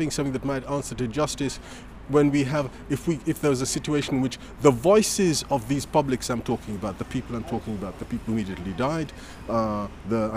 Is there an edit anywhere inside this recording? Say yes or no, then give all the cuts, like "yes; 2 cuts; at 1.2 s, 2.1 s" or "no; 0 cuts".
no; 0 cuts